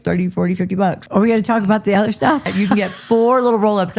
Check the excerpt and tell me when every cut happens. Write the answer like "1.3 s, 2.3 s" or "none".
1.0 s, 2.5 s